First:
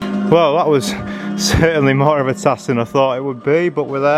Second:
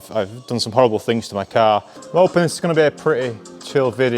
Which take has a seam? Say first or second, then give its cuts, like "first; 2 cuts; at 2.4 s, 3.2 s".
second; 1 cut; at 2.0 s